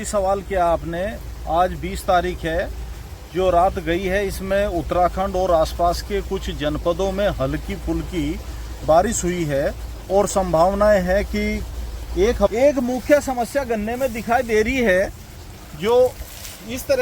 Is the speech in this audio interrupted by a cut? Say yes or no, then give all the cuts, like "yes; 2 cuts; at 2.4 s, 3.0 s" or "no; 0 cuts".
yes; 1 cut; at 12.5 s